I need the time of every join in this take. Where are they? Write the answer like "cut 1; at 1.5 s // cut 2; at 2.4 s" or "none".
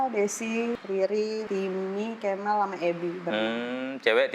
cut 1; at 0.8 s // cut 2; at 1.4 s